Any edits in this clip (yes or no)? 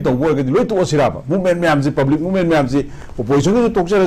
no